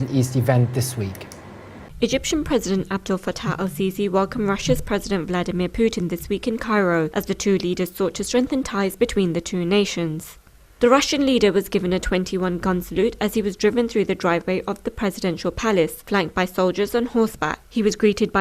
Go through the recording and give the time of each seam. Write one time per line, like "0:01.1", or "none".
0:10.3